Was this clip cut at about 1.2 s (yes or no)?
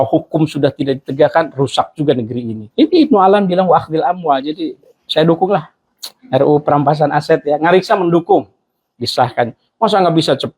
no